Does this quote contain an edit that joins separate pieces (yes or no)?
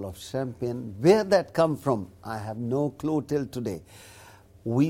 no